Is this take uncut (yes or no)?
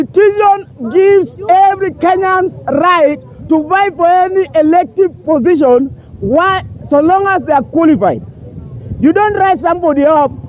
yes